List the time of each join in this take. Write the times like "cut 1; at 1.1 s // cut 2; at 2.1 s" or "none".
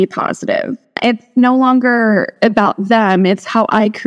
cut 1; at 1.0 s // cut 2; at 2.3 s